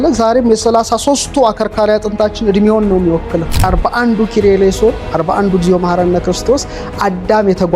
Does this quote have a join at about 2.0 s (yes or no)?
no